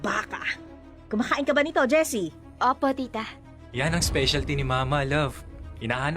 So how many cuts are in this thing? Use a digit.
1